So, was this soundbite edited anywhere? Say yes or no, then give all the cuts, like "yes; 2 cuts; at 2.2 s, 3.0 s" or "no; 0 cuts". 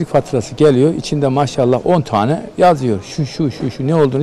no; 0 cuts